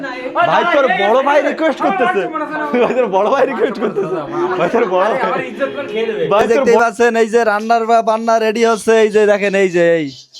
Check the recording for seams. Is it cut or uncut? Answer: uncut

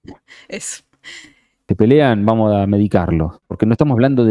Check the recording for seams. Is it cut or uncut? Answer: cut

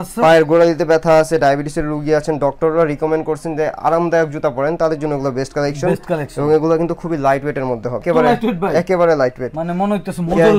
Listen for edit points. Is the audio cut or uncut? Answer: uncut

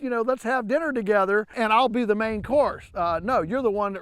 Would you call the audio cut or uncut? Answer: cut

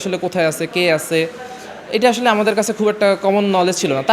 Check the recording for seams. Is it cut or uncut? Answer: uncut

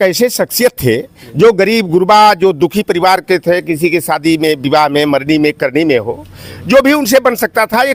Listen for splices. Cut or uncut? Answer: uncut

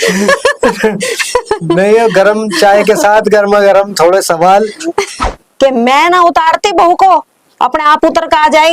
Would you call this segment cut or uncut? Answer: cut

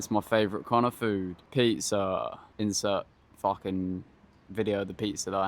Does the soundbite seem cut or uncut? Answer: cut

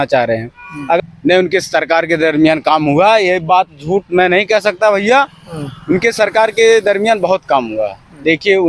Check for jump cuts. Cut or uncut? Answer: cut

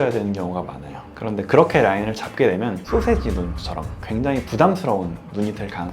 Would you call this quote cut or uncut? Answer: cut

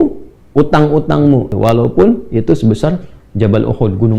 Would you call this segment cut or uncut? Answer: cut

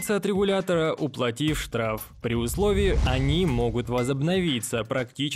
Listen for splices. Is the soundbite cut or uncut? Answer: cut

